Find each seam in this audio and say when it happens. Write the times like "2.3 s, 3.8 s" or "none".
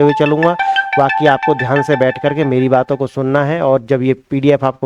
none